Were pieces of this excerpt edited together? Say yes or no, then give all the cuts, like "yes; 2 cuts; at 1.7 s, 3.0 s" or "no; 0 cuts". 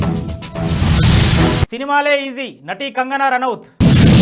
no; 0 cuts